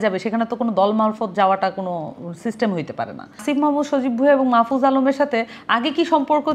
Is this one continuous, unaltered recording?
no; 1 cut; at 3.4 s

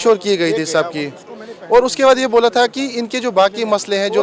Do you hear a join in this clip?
no; 0 cuts

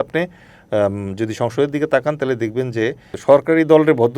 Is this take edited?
yes; 1 cut; at 3.1 s

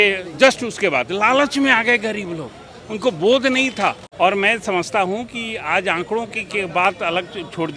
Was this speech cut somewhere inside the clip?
yes; 1 cut; at 4.0 s

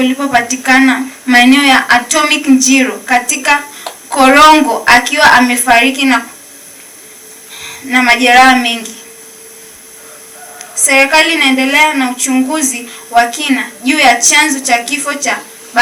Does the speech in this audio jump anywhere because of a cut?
no; 0 cuts

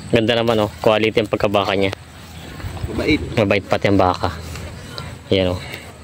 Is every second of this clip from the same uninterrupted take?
yes; 0 cuts

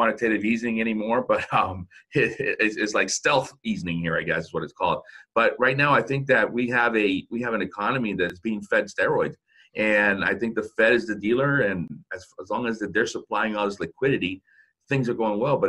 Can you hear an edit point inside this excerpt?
yes; 2 cuts; at 8.3 s, 11.9 s

